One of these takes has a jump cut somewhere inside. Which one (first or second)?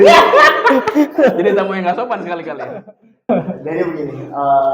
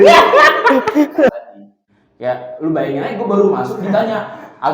second